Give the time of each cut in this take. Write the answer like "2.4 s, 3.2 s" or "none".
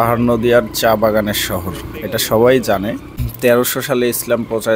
3.2 s